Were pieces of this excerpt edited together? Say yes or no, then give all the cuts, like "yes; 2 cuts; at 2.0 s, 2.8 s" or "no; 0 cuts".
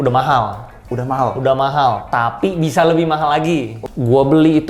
yes; 1 cut; at 3.8 s